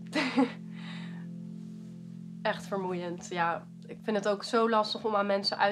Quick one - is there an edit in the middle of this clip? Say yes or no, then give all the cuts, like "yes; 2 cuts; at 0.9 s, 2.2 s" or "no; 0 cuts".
no; 0 cuts